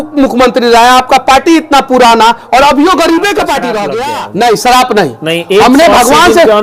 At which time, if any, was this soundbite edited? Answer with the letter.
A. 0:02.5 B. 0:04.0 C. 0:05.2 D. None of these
B